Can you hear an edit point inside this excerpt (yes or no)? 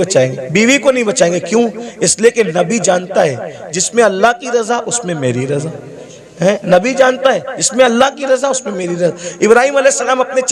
no